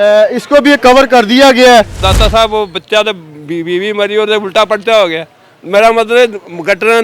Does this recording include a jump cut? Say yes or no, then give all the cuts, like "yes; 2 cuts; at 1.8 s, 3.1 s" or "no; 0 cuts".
yes; 1 cut; at 2.0 s